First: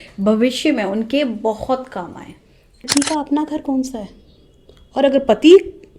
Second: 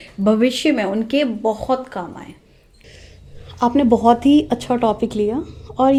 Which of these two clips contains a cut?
first; 1 cut; at 2.9 s

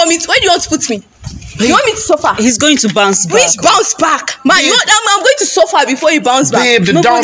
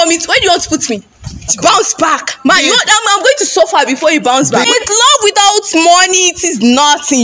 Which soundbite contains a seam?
second; 2 cuts; at 1.5 s, 4.6 s

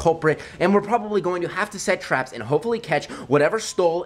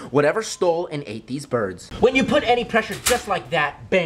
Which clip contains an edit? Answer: second; 1 cut; at 1.8 s

